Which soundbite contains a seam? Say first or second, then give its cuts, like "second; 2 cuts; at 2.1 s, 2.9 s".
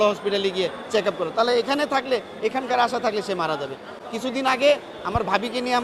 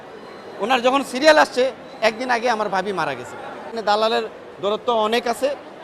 second; 1 cut; at 3.7 s